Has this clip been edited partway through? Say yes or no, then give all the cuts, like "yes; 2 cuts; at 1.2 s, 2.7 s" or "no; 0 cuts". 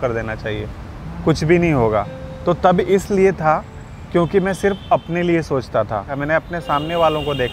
yes; 1 cut; at 6.2 s